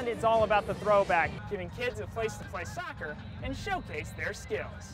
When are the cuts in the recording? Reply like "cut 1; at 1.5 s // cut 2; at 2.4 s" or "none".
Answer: cut 1; at 1.4 s